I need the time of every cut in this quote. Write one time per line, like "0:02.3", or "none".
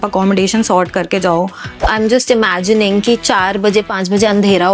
0:01.8

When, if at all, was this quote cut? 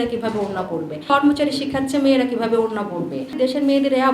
0:01.1
0:03.3

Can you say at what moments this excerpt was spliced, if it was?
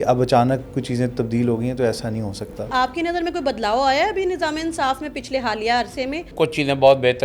0:02.7
0:06.3

